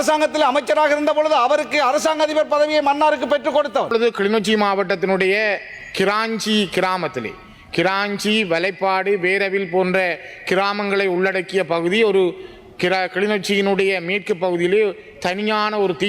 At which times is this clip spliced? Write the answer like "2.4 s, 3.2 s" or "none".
3.9 s